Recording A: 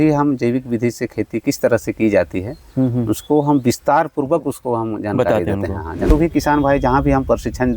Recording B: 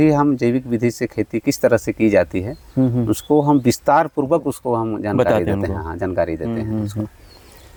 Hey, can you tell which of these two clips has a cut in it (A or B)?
A